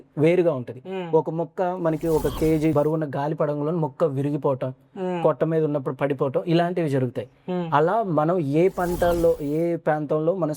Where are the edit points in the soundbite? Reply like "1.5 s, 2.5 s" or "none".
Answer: 2.7 s